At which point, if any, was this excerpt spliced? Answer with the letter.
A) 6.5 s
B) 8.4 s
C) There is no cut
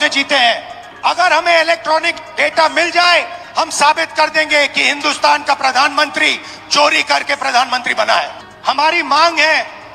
B